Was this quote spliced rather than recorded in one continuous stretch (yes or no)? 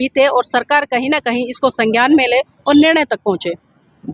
no